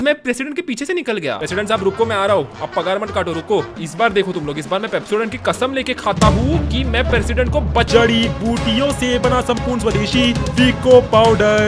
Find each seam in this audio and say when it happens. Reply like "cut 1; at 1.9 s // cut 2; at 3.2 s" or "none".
cut 1; at 1.4 s // cut 2; at 3.8 s // cut 3; at 7.9 s